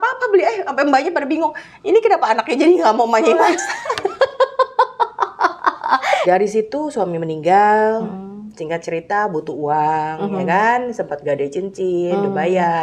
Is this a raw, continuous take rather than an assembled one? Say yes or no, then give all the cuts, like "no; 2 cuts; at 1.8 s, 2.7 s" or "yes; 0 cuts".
no; 1 cut; at 6.2 s